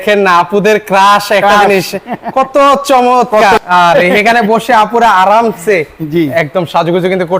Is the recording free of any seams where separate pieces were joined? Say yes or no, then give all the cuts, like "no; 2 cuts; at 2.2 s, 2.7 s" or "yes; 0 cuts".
no; 1 cut; at 3.6 s